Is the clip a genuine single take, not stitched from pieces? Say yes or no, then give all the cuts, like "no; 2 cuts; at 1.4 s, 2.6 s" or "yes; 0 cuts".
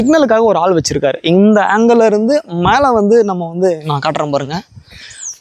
yes; 0 cuts